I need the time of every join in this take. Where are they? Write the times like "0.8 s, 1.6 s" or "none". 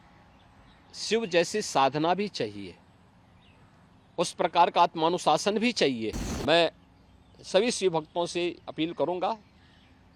6.3 s